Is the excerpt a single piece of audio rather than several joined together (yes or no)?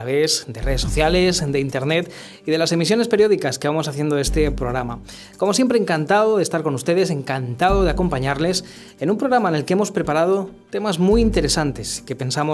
no